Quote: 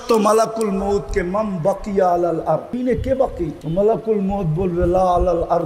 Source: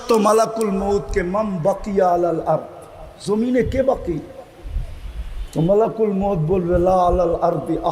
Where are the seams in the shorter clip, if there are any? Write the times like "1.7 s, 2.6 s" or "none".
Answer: 2.8 s, 3.6 s

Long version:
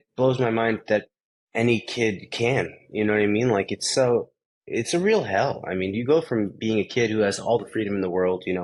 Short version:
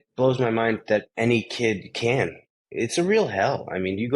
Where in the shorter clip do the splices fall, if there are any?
1.1 s, 2.4 s

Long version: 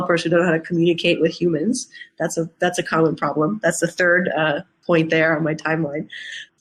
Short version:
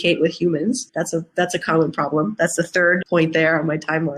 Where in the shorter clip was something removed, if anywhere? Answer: 0.9 s, 3.0 s

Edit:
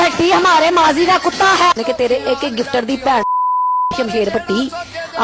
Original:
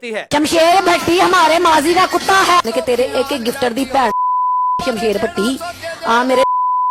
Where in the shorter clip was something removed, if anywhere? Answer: none

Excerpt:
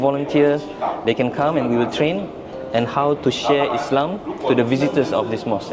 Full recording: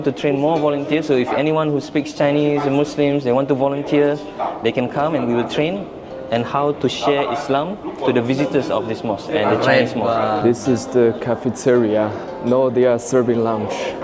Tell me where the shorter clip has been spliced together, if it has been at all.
none

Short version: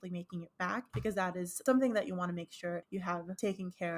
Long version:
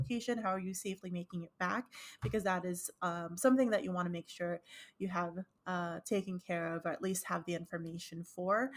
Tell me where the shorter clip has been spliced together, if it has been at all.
1.3 s, 3.2 s

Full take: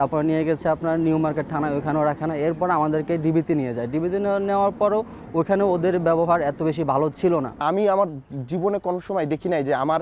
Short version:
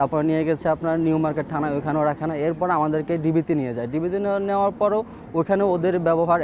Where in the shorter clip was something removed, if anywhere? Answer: none

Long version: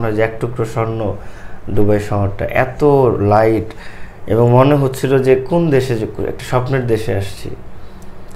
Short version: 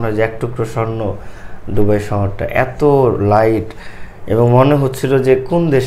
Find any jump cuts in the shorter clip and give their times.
none

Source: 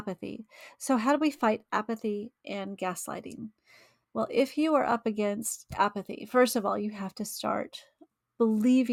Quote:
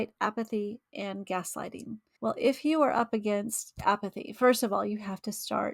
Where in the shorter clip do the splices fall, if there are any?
2.0 s

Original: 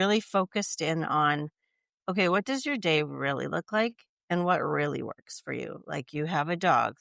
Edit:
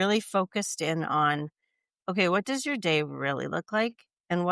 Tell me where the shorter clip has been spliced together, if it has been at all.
none

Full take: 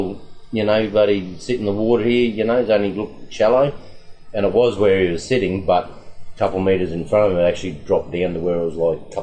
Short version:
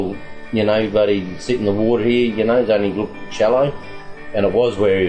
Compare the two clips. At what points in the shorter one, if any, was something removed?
none

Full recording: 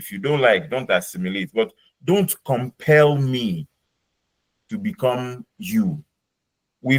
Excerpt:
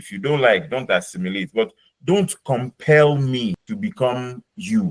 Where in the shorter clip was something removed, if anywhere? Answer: 3.6 s

